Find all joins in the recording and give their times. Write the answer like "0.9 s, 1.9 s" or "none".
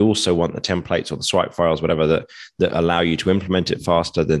none